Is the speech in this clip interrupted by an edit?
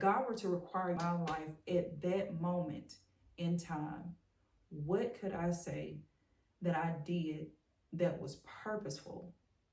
yes; 1 cut; at 1.0 s

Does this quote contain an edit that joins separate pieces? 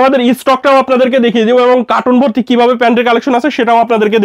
no; 0 cuts

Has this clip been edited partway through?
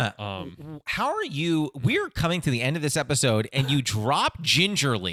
no; 0 cuts

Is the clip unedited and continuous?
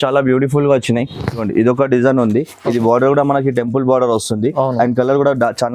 no; 1 cut; at 1.4 s

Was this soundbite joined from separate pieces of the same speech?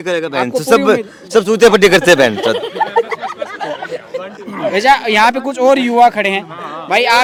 no; 0 cuts

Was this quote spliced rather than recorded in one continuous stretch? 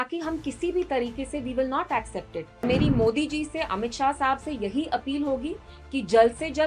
yes; 1 cut; at 2.6 s

